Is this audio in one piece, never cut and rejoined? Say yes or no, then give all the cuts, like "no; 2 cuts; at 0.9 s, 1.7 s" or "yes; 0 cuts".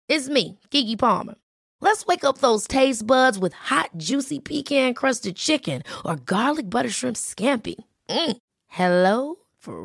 yes; 0 cuts